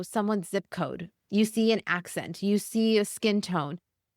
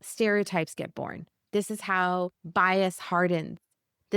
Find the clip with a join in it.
second; 2 cuts; at 1.4 s, 2.4 s

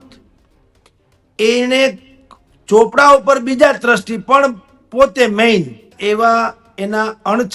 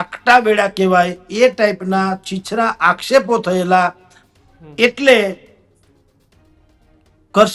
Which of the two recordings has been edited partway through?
first; 1 cut; at 5.9 s

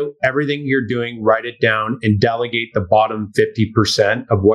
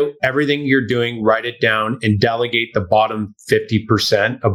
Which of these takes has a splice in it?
first; 1 cut; at 3.2 s

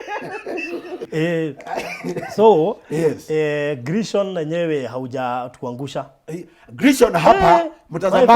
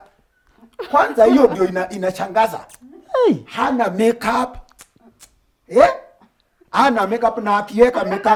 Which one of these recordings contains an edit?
first; 1 cut; at 1.1 s

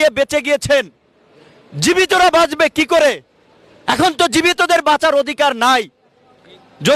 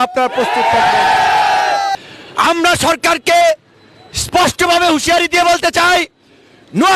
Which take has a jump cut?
second; 1 cut; at 1.9 s

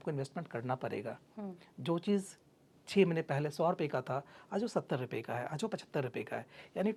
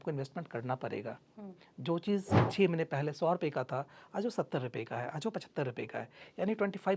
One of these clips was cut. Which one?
second; 1 cut; at 2.4 s

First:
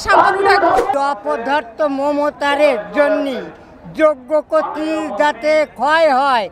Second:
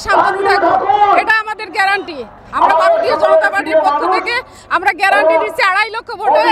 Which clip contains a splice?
first; 1 cut; at 0.9 s

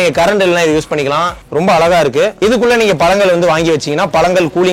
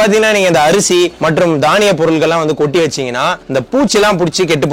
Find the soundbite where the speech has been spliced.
first; 2 cuts; at 1.4 s, 2.4 s

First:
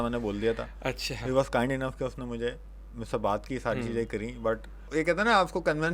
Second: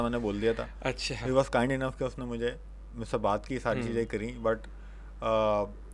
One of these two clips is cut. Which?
first; 1 cut; at 4.9 s

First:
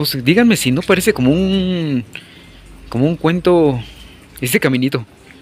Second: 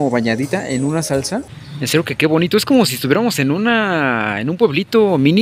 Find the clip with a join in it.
second; 1 cut; at 1.6 s

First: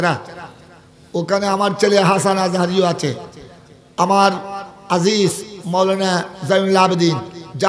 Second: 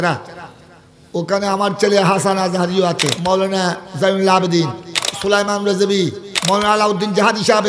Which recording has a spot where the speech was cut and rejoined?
second; 3 cuts; at 3.1 s, 5.0 s, 6.3 s

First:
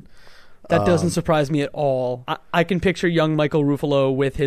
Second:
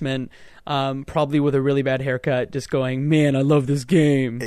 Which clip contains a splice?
first; 1 cut; at 2.3 s

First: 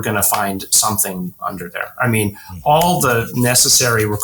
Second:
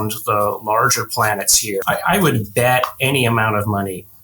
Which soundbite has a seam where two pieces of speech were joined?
second; 1 cut; at 1.8 s

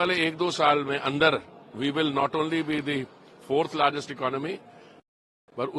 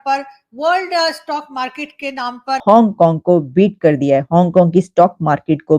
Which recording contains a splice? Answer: second; 1 cut; at 2.5 s

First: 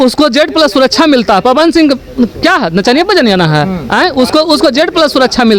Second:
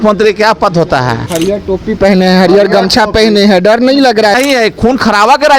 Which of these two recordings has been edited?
second; 2 cuts; at 1.2 s, 4.3 s

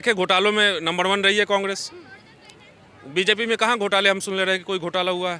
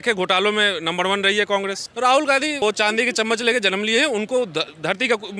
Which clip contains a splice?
second; 2 cuts; at 1.8 s, 2.6 s

